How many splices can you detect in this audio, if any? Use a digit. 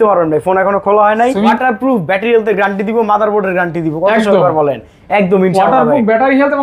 1